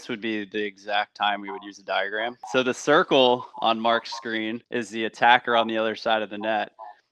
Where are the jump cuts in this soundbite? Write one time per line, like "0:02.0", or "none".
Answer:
0:02.4

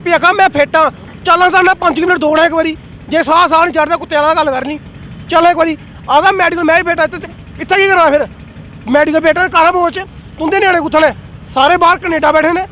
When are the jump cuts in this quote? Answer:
none

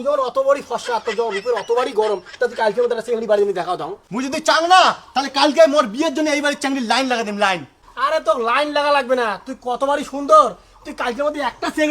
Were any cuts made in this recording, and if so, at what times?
0:04.0

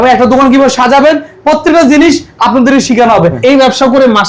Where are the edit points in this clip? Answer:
0:03.4

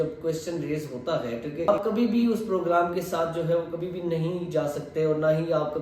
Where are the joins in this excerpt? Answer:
0:01.7

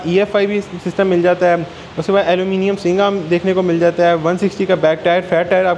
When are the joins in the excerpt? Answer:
none

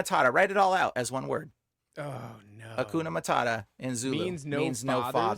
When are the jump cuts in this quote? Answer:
none

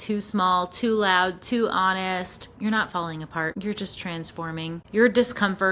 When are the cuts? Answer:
0:03.6
0:04.8

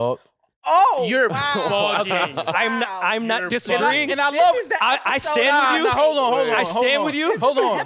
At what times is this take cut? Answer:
none

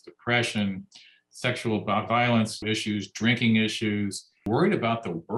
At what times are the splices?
0:02.6
0:04.5

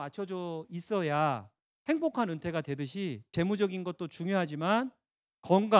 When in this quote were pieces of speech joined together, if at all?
0:03.3

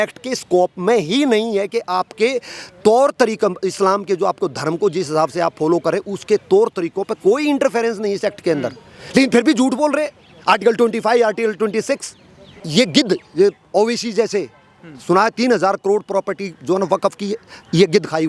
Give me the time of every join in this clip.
0:12.6

